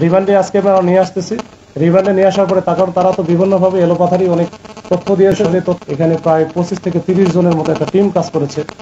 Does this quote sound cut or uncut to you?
cut